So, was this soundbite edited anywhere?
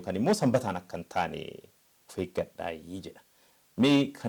no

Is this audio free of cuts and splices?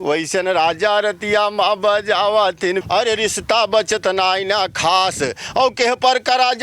no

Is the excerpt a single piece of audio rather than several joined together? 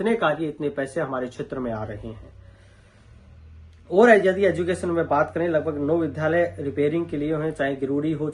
yes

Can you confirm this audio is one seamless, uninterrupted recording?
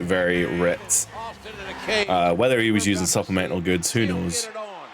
yes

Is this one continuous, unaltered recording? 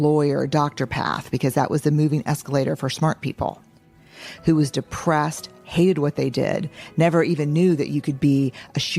yes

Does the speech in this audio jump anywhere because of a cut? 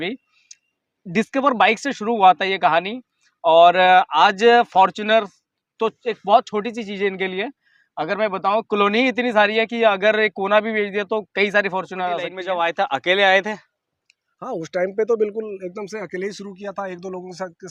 yes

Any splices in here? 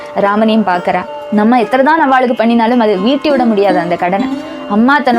yes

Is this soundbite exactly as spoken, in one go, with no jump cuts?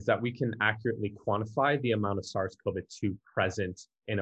yes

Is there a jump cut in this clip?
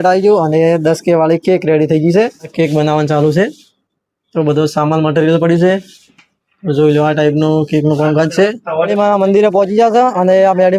yes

